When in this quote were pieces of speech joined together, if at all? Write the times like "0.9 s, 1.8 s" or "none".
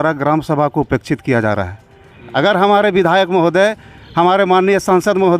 2.2 s